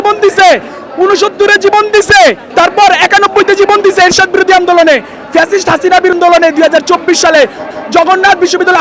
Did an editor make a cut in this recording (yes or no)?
yes